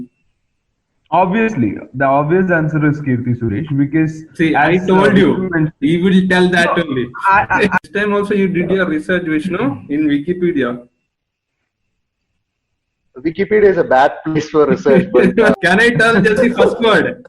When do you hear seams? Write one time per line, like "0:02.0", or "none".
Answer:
0:07.8
0:15.6